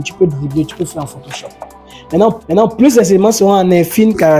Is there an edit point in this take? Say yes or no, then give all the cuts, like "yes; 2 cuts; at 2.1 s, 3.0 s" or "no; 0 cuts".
no; 0 cuts